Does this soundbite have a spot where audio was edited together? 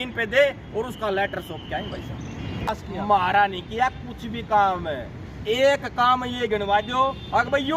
yes; 1 cut; at 2.7 s

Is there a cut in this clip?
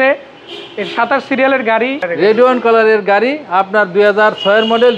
yes; 1 cut; at 2.1 s

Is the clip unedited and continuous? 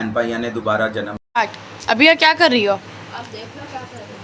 no; 1 cut; at 1.2 s

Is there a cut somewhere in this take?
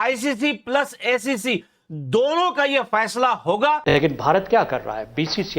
yes; 1 cut; at 3.8 s

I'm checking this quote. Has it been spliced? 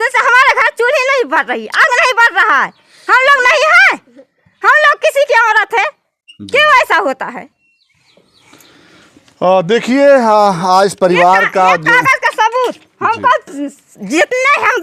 no; 0 cuts

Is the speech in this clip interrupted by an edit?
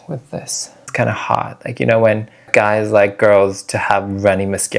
yes; 2 cuts; at 0.9 s, 2.5 s

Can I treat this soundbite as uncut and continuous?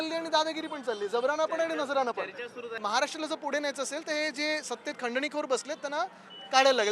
no; 1 cut; at 2.7 s

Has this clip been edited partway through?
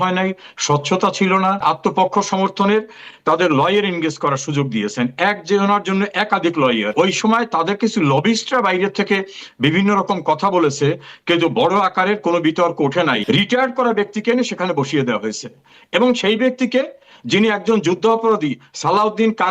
yes; 3 cuts; at 1.6 s, 6.9 s, 13.2 s

